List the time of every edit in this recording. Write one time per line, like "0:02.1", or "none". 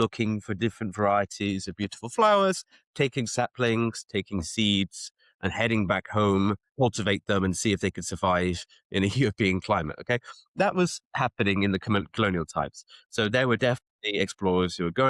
0:06.7